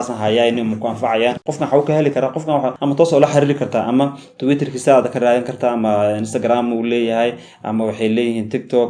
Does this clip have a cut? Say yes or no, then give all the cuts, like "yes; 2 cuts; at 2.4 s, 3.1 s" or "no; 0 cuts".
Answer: yes; 1 cut; at 1.4 s